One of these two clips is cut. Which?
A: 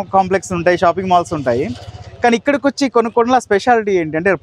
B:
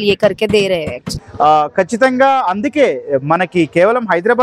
B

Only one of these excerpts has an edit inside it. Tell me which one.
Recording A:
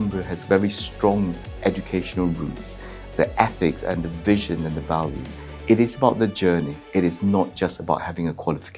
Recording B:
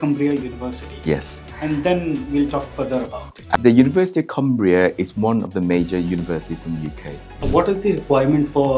B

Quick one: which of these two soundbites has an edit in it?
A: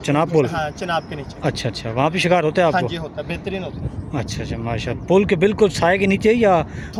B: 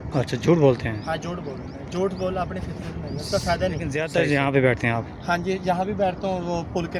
B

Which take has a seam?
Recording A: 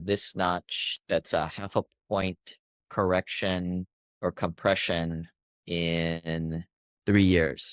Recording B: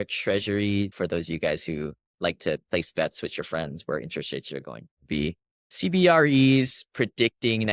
B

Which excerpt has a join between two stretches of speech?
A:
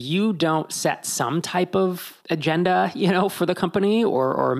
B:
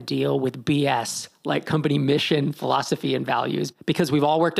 A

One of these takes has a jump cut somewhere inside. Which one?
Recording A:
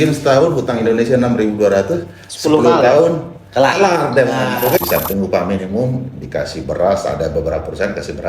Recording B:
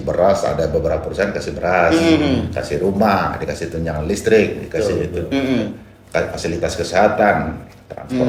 A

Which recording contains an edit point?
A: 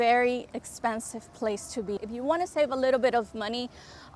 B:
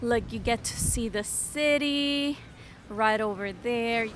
A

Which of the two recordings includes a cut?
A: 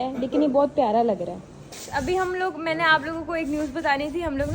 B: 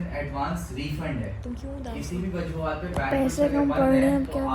A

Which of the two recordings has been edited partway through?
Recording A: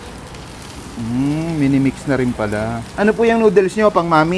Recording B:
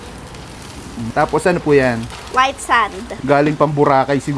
B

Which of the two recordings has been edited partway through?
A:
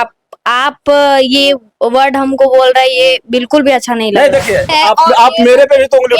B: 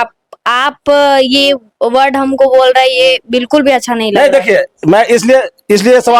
A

